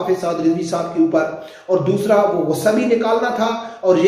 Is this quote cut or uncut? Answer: uncut